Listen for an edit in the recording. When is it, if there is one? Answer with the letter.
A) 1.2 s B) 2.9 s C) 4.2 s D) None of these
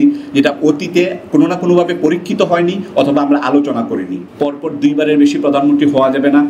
C